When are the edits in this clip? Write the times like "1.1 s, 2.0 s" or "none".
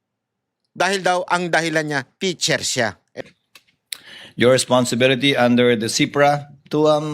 3.2 s